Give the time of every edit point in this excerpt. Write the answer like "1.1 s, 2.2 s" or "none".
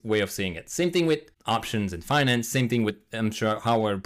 1.3 s